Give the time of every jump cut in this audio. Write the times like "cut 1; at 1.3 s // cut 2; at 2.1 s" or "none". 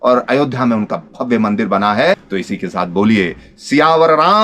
cut 1; at 2.2 s